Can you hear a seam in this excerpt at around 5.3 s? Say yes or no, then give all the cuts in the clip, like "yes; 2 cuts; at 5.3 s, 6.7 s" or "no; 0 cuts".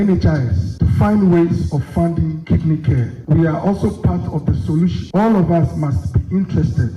no; 0 cuts